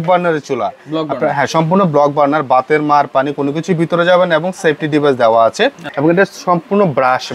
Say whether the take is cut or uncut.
cut